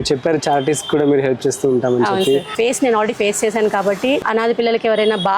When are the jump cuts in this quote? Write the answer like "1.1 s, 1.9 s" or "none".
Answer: 2.5 s, 4.2 s